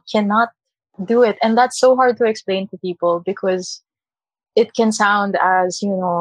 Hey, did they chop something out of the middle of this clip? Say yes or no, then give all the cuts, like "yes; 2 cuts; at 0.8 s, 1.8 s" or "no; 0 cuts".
no; 0 cuts